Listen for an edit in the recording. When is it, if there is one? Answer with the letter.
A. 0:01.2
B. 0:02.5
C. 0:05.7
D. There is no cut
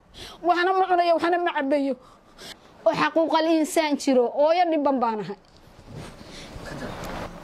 B